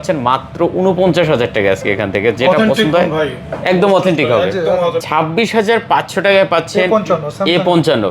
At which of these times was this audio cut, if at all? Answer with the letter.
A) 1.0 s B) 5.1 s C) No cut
B